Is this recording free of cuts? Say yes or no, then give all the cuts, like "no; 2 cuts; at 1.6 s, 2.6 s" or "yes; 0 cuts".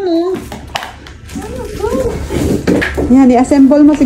no; 1 cut; at 2.9 s